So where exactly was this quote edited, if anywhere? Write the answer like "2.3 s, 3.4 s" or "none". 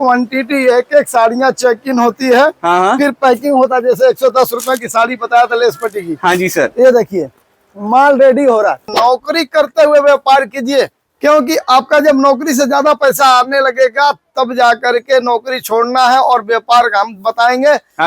8.9 s, 11.0 s